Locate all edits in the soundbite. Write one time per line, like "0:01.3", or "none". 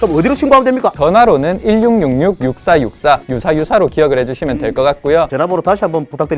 0:03.3
0:05.3